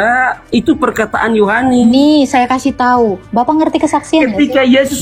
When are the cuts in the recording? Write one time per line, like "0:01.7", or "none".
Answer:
0:03.2